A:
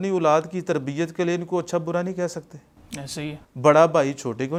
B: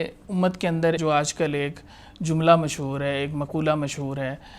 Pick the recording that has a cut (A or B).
B